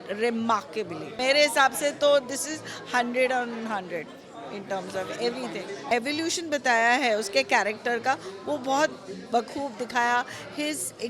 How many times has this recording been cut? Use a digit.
2